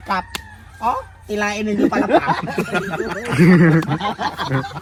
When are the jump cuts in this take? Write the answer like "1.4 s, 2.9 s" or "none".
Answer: none